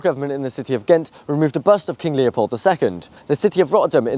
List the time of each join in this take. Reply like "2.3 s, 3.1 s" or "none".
3.2 s